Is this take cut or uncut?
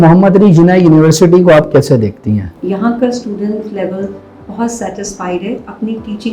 cut